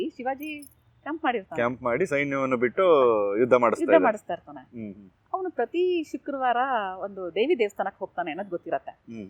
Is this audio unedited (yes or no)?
yes